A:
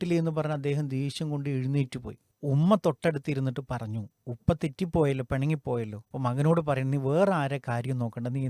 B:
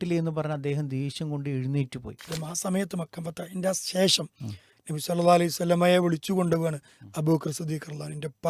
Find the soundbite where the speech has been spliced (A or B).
B